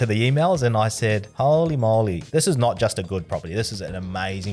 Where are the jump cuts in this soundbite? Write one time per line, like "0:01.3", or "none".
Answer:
0:01.3
0:02.2